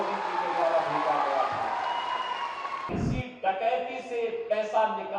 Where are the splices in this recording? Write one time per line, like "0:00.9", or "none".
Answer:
0:02.9